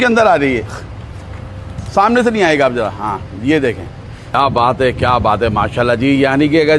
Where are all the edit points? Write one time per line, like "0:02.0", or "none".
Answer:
0:04.3